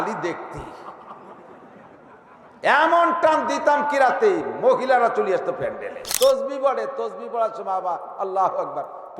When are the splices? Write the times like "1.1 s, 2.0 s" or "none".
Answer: 6.1 s